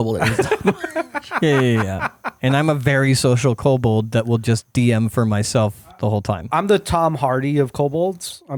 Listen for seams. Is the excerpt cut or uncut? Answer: uncut